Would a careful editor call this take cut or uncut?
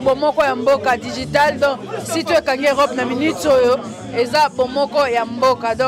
uncut